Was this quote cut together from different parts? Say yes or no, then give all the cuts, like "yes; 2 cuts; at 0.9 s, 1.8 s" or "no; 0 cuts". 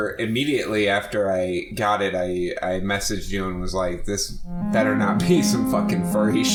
no; 0 cuts